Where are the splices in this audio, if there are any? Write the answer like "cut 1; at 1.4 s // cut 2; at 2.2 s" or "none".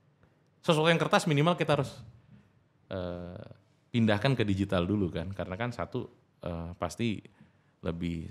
none